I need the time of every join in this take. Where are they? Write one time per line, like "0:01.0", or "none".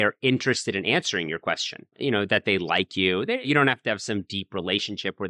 0:01.9
0:03.5